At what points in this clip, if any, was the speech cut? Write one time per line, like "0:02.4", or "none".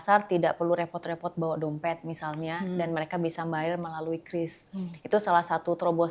none